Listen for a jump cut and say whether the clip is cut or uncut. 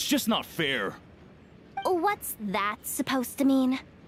uncut